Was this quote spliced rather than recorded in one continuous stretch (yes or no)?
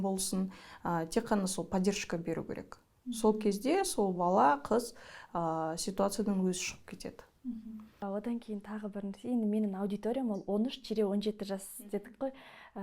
no